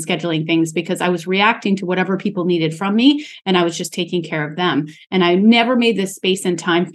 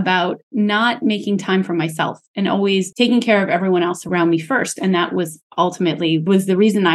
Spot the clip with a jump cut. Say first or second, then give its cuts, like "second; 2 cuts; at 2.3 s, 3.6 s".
second; 3 cuts; at 2.9 s, 4.1 s, 6.3 s